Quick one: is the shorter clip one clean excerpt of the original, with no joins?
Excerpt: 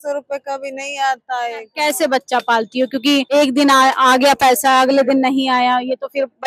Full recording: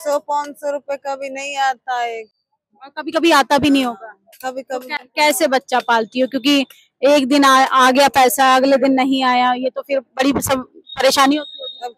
no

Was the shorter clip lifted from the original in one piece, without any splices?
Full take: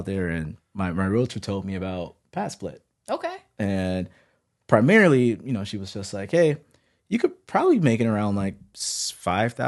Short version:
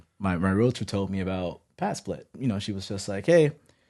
no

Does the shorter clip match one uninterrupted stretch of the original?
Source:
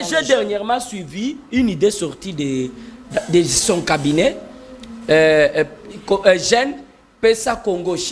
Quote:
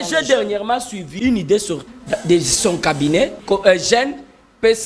no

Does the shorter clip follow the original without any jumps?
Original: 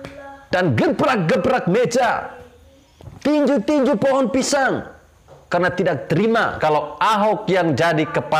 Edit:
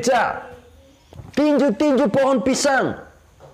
yes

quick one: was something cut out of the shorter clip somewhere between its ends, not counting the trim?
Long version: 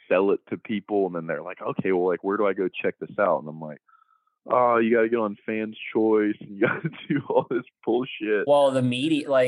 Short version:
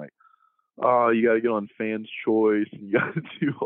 no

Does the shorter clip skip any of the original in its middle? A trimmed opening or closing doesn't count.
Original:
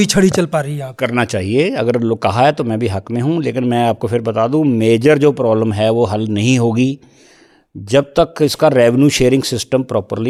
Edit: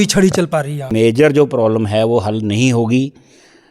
yes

